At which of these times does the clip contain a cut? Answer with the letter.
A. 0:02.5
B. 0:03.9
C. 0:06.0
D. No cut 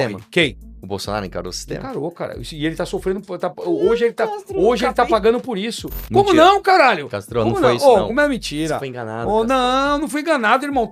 C